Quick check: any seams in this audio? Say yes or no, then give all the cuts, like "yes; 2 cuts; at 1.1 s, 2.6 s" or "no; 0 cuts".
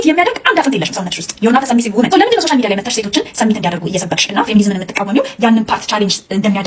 no; 0 cuts